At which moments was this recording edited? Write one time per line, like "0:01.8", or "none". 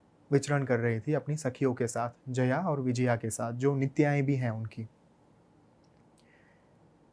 none